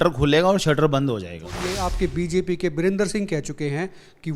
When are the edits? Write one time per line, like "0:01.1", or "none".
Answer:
0:01.7